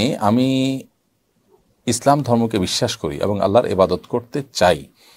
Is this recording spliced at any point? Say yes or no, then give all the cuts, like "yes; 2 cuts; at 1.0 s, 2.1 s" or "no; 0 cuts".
no; 0 cuts